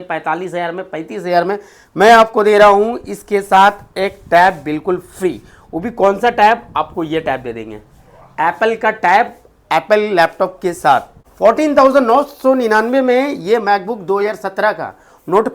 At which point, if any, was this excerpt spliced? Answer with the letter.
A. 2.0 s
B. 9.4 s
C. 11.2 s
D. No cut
C